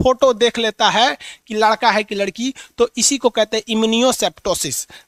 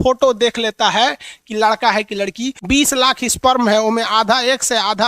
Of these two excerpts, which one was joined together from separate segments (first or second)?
second